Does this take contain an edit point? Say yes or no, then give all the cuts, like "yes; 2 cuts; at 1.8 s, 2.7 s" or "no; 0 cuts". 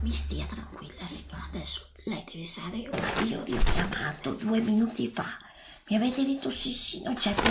yes; 1 cut; at 2.9 s